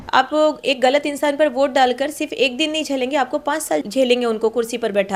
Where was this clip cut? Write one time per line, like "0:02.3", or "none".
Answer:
none